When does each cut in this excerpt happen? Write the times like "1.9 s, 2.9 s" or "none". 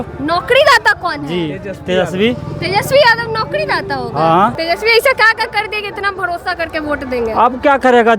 4.6 s